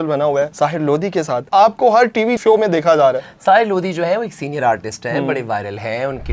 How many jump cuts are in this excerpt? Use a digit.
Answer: 0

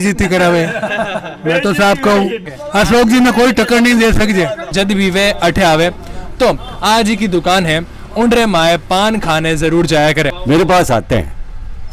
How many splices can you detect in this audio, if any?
3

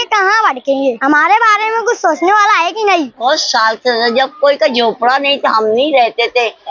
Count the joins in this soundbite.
2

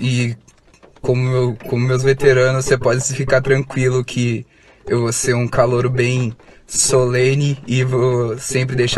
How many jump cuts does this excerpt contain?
0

